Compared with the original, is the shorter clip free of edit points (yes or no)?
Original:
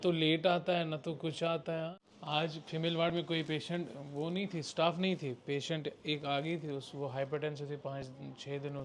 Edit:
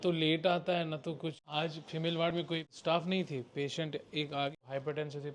no